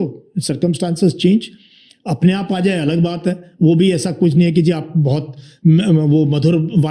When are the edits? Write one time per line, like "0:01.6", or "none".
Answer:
none

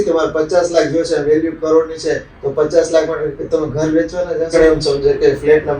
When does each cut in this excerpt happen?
0:04.6

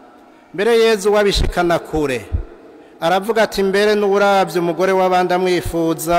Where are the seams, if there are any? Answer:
none

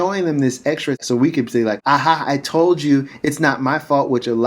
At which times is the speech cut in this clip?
0:01.0
0:01.8

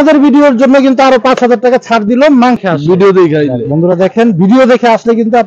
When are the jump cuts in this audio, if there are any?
0:02.6

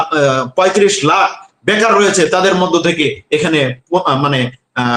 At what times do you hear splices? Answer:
none

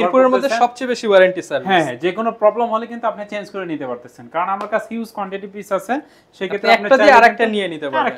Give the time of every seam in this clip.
none

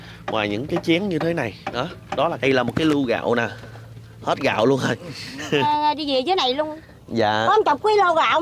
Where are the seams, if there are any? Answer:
0:02.4
0:05.6

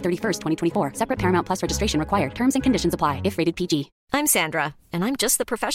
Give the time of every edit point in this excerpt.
0:04.0

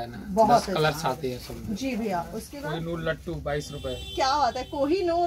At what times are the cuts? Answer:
0:02.5

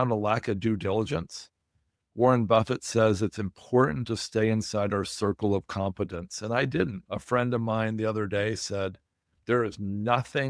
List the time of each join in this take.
0:07.0

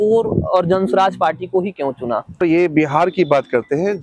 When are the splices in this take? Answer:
0:02.4

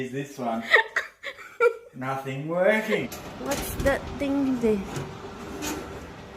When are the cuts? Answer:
0:03.2

